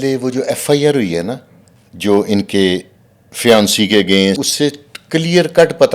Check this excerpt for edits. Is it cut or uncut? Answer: cut